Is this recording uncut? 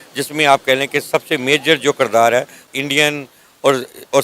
no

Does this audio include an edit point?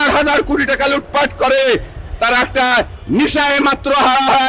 no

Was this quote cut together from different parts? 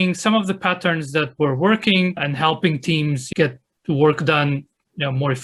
no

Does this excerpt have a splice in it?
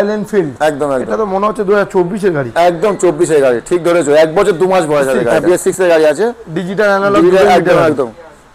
yes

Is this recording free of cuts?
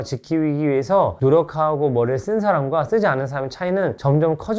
yes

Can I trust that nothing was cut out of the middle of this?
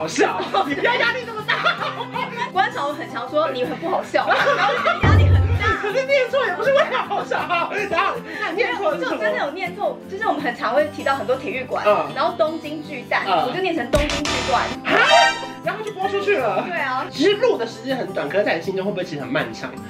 yes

